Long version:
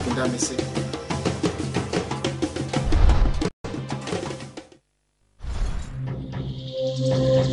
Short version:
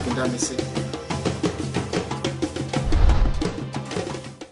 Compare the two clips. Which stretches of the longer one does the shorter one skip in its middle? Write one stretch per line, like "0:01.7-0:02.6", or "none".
0:03.5-0:03.7